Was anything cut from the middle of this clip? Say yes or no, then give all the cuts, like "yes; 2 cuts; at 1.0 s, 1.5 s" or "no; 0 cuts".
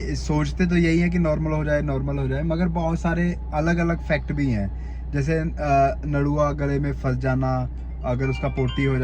no; 0 cuts